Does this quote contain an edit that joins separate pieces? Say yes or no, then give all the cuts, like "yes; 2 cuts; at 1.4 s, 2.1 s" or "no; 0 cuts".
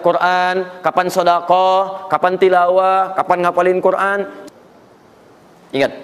yes; 1 cut; at 4.3 s